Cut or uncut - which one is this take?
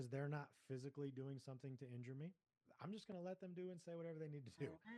uncut